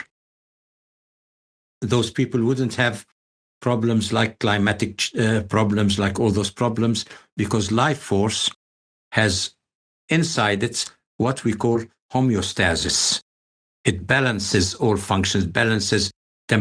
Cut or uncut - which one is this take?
uncut